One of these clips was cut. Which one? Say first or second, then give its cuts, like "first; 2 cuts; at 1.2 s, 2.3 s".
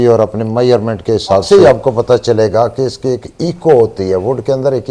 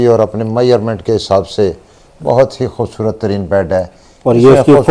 first; 1 cut; at 1.4 s